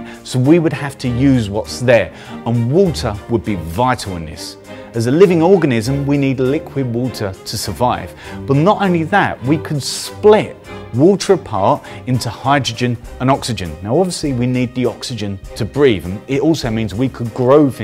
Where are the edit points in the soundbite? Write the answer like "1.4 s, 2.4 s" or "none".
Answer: 16.9 s

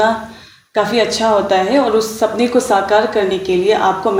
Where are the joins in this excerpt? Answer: none

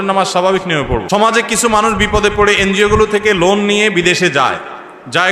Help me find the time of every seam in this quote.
1.2 s

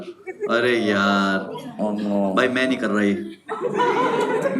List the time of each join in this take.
none

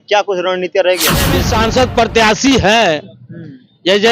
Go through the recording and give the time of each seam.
1.4 s

